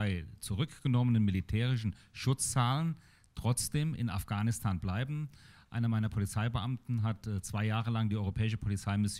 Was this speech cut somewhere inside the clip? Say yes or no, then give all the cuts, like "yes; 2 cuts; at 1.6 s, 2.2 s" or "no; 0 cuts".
no; 0 cuts